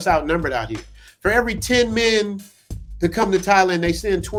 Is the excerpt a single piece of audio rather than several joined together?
yes; 0 cuts

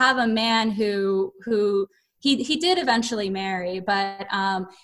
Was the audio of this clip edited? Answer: no; 0 cuts

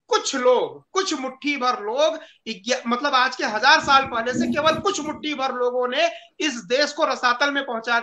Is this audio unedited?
yes; 0 cuts

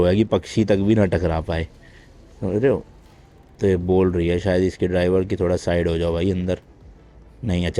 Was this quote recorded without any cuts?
yes; 0 cuts

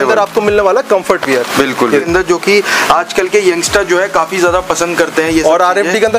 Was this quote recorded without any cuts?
no; 1 cut; at 2.1 s

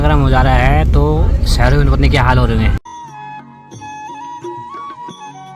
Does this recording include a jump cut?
no; 0 cuts

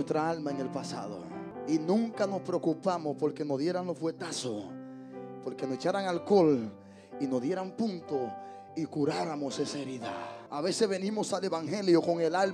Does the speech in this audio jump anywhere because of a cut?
yes; 2 cuts; at 1.5 s, 10.4 s

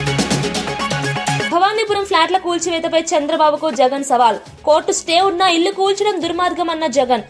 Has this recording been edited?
yes; 1 cut; at 1.4 s

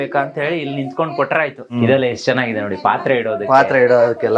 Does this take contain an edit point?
yes; 1 cut; at 1.7 s

